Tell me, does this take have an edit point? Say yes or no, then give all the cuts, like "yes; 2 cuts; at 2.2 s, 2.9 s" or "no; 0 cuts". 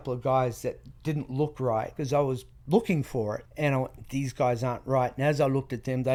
no; 0 cuts